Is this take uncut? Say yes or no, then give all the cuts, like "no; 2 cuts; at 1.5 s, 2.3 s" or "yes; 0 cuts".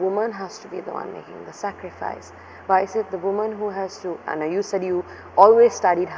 yes; 0 cuts